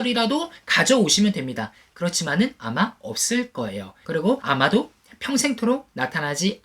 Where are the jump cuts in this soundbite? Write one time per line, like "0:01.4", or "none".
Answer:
0:04.2